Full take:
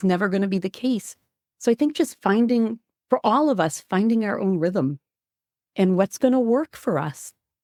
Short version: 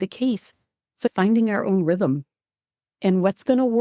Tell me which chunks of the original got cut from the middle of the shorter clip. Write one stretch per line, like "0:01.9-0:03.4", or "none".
0:01.7-0:03.8